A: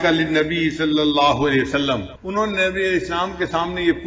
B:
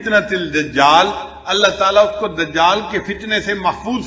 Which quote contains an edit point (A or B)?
A